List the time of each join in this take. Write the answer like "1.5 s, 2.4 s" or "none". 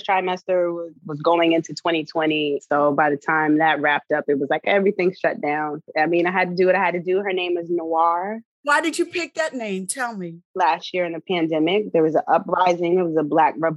0.9 s, 2.6 s, 5.8 s, 8.6 s, 10.5 s